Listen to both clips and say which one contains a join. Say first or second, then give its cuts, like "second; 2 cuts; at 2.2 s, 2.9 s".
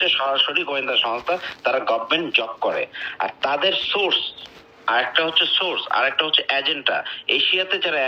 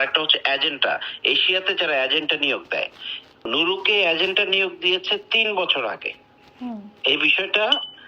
second; 1 cut; at 3.4 s